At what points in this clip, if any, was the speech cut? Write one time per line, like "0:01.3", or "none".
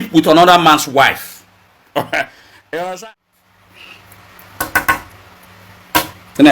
0:03.0

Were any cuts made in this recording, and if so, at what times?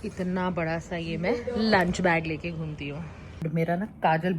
0:03.4

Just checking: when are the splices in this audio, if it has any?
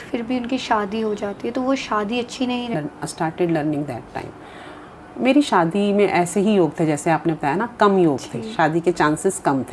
0:02.7

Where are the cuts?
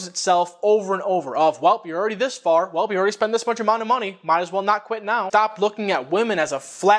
0:05.3

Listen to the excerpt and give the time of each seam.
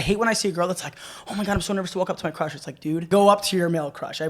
0:03.1

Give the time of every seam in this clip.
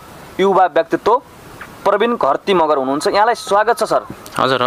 none

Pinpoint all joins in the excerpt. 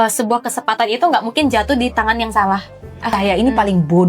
0:02.9

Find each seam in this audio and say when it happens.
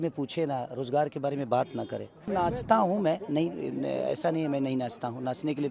0:02.3

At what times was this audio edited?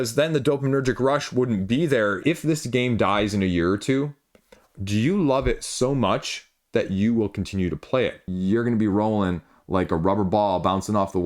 0:02.2
0:08.2

